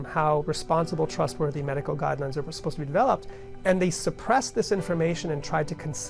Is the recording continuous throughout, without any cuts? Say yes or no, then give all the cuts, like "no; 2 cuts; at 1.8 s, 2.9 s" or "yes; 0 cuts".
yes; 0 cuts